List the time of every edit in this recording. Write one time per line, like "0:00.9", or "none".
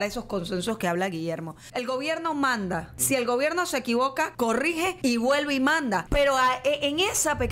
0:01.6
0:02.9
0:04.5
0:06.1